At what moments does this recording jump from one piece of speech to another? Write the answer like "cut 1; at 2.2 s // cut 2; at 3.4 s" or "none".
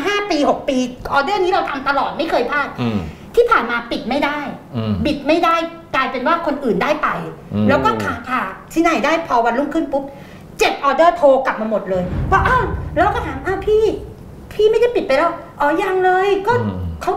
none